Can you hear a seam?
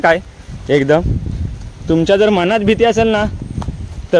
no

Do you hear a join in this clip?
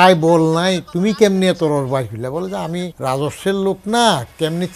yes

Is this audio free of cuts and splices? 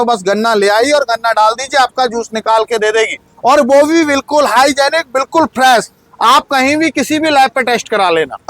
yes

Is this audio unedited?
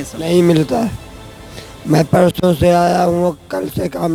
yes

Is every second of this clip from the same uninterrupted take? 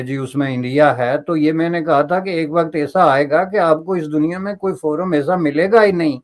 yes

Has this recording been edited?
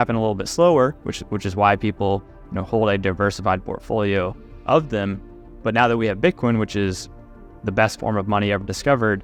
no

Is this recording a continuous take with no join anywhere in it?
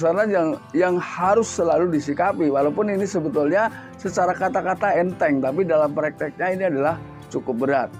yes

